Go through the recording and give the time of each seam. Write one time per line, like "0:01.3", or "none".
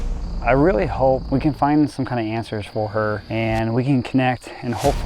0:01.2
0:03.2